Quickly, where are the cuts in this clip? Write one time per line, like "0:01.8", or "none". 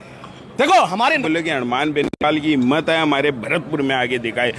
0:01.2